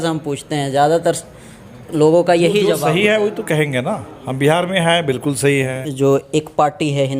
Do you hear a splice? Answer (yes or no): yes